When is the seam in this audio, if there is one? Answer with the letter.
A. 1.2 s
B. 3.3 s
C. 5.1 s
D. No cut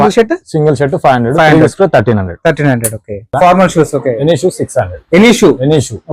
B